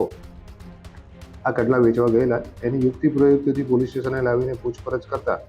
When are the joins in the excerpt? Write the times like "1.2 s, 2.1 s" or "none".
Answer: none

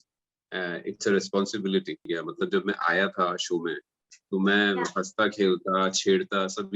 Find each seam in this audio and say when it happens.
2.0 s

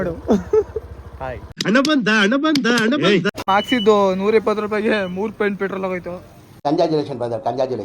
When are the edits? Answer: 3.3 s

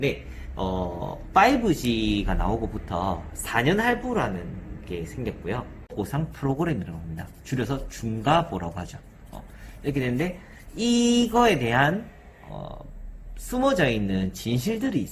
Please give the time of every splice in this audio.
5.9 s

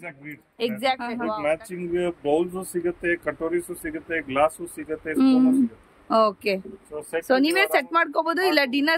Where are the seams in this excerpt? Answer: 1.2 s

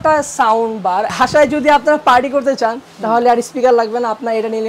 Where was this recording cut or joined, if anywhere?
1.1 s

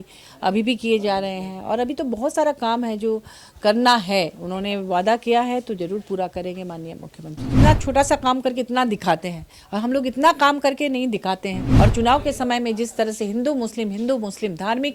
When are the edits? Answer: 7.5 s, 11.6 s

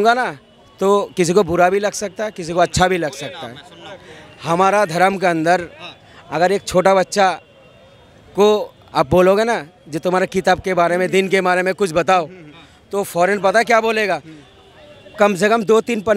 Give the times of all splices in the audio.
none

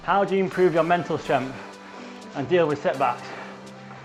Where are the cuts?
none

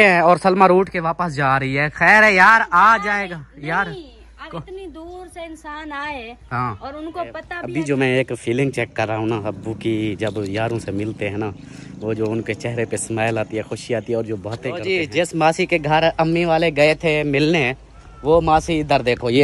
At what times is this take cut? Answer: 7.5 s, 14.8 s

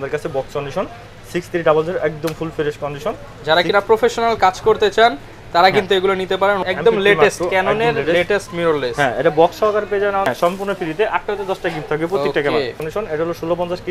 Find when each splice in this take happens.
6.6 s, 10.3 s, 12.8 s

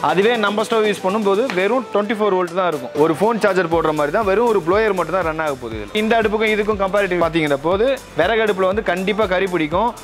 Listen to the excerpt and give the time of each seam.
6.0 s, 7.2 s

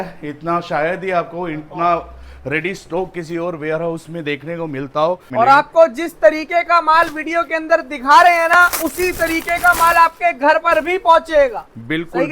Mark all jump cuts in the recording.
5.2 s

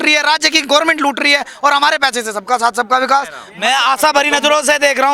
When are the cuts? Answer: 3.4 s

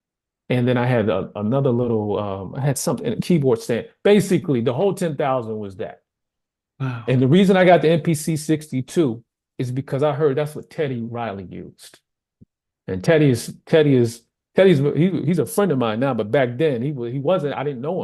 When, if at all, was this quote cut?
none

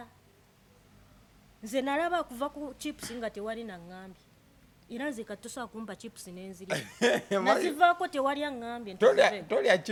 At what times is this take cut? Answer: none

